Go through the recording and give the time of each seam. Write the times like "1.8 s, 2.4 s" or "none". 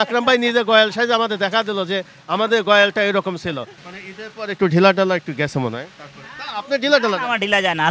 none